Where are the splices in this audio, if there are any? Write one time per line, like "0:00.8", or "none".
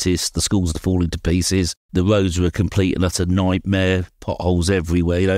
0:01.8

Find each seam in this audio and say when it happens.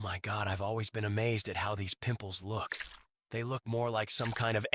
none

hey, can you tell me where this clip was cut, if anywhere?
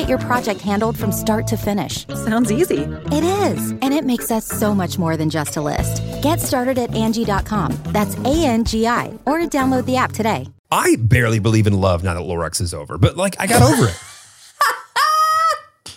0:10.6

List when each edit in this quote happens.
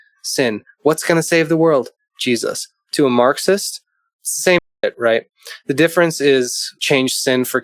0:06.7

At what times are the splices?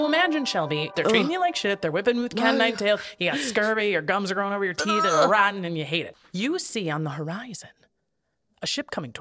0:00.9

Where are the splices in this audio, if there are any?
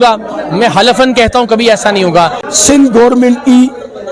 0:02.5

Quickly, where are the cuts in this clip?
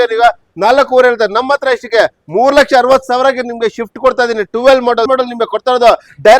0:05.1

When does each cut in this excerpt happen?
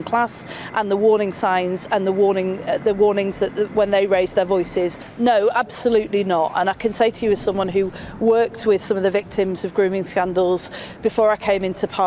0:05.0

